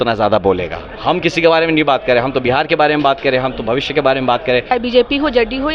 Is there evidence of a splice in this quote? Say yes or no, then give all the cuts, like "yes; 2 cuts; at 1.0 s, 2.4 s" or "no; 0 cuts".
yes; 1 cut; at 4.7 s